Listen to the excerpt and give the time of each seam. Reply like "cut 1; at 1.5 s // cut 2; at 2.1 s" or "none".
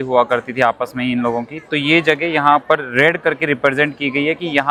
none